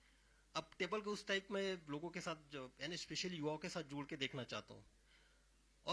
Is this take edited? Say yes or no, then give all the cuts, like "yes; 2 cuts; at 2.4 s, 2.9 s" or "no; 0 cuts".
no; 0 cuts